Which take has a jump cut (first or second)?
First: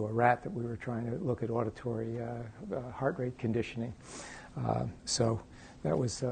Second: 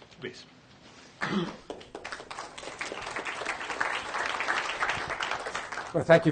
second